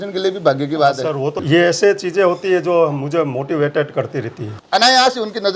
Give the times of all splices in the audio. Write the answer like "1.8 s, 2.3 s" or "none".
1.4 s, 4.6 s

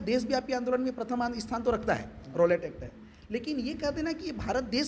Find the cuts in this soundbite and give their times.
none

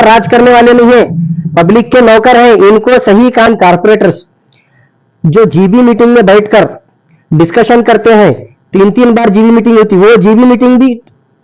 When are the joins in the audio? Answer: 3.4 s

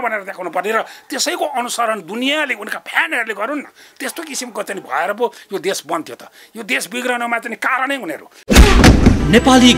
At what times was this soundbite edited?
8.3 s

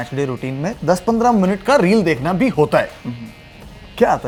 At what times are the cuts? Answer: none

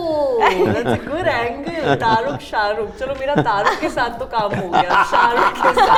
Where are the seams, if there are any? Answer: none

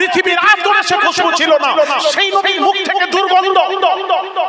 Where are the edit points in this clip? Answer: none

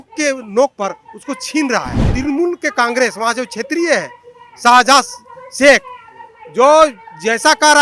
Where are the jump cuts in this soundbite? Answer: 2.1 s

